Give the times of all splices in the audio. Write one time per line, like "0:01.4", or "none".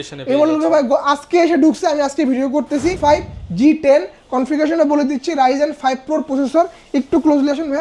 0:03.0